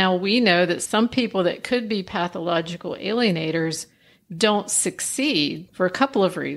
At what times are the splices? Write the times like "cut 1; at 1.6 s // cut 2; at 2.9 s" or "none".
cut 1; at 5.6 s